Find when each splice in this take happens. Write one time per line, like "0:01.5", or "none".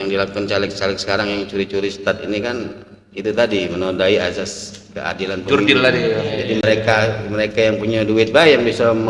none